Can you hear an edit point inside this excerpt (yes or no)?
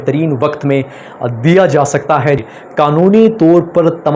yes